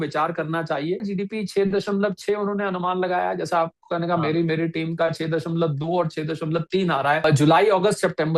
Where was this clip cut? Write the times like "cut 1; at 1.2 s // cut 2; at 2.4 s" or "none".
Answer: cut 1; at 1.1 s // cut 2; at 7.2 s